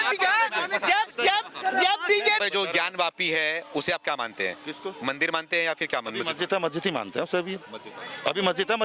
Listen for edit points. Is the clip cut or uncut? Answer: cut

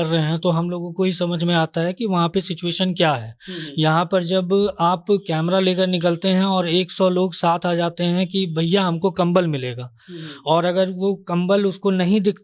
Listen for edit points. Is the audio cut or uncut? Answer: uncut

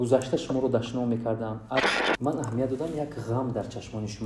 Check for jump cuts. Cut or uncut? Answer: cut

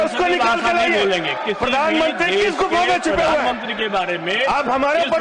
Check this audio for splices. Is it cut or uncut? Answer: uncut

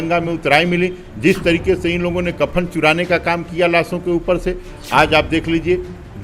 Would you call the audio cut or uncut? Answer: uncut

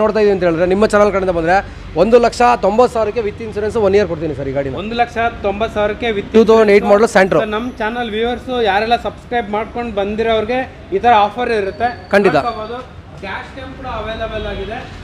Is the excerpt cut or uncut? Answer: uncut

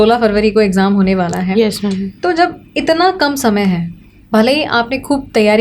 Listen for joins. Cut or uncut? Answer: uncut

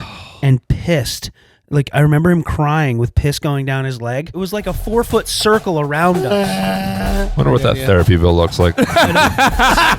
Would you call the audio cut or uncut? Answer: cut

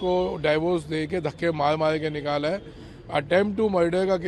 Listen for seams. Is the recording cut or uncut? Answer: uncut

